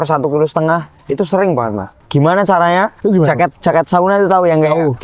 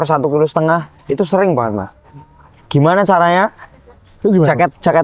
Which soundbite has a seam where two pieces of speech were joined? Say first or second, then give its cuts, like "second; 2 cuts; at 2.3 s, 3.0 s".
first; 2 cuts; at 1.9 s, 2.9 s